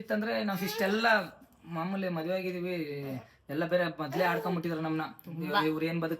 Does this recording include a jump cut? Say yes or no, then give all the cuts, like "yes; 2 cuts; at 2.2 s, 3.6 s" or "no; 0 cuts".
no; 0 cuts